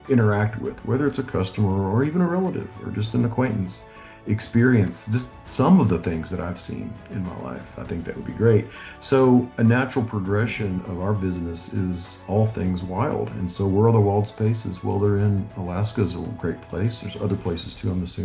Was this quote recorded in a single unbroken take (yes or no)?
yes